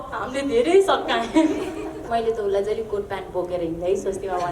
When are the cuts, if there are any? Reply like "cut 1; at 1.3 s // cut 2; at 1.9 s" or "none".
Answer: cut 1; at 2.1 s